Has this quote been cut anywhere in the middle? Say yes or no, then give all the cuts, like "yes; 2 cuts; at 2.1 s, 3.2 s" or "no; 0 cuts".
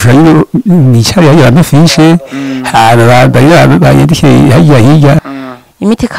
yes; 1 cut; at 5.2 s